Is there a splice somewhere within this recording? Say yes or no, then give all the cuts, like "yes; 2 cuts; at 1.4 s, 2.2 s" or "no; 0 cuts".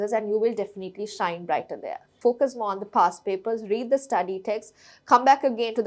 yes; 1 cut; at 2.1 s